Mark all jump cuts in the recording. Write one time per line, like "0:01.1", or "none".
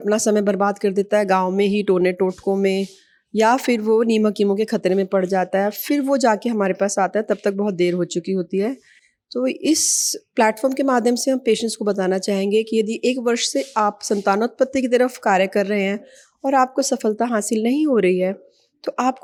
none